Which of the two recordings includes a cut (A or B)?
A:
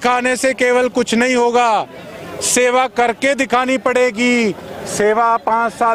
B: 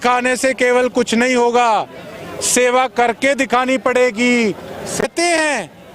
B